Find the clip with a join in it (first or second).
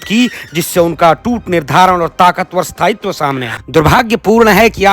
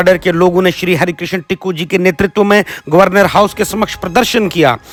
first